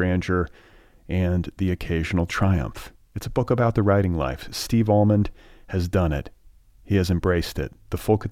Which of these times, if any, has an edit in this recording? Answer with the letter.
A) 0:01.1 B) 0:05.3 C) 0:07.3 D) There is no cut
D